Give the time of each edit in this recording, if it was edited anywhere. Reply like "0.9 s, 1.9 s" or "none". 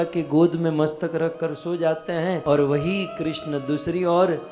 2.4 s

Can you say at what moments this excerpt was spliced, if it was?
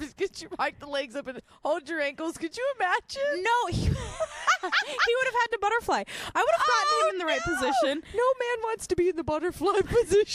none

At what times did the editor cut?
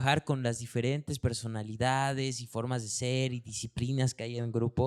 none

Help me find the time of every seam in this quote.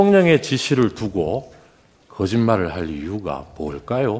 none

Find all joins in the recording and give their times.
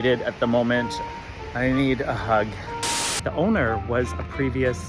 1.0 s, 2.9 s

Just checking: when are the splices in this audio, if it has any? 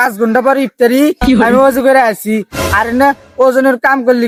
none

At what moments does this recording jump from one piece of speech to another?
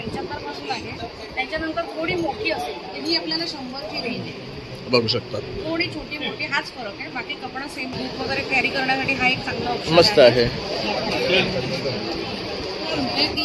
8.0 s

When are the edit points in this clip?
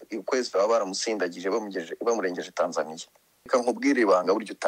3.5 s

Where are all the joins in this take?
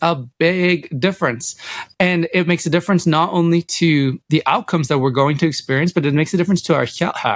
4.2 s

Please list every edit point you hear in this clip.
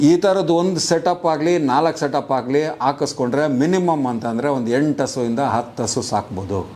none

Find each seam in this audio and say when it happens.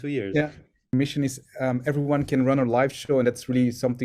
0.9 s

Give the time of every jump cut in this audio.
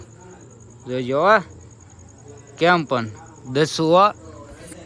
none

